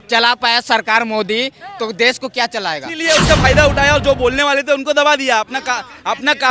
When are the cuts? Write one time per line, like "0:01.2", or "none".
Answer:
0:03.0